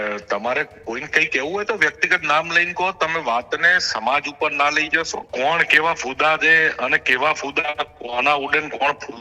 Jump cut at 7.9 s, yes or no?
no